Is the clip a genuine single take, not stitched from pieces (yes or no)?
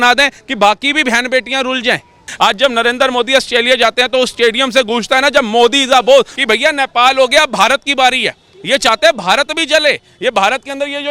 no